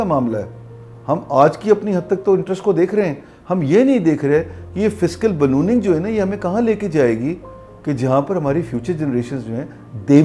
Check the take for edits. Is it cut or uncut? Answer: uncut